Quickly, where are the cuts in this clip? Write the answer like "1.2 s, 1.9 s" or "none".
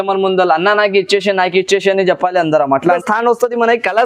2.9 s